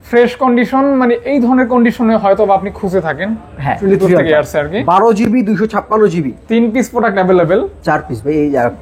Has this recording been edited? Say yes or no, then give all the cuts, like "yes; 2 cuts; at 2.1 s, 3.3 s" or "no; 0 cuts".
yes; 1 cut; at 3.8 s